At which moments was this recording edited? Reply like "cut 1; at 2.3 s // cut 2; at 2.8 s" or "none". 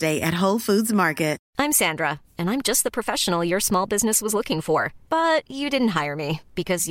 cut 1; at 1.4 s

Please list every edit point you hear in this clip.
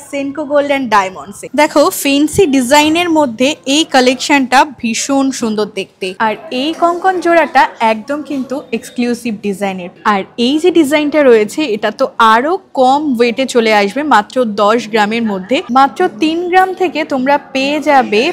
cut 1; at 1.4 s // cut 2; at 6.1 s // cut 3; at 10.0 s // cut 4; at 15.7 s

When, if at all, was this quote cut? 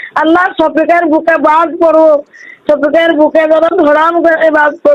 none

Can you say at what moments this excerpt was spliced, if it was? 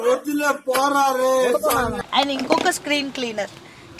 cut 1; at 1.9 s

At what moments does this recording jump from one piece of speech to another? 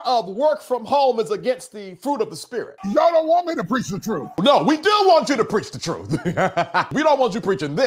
cut 1; at 2.7 s // cut 2; at 4.3 s // cut 3; at 6.9 s

